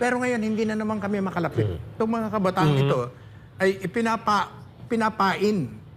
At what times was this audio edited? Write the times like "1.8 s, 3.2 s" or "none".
1.9 s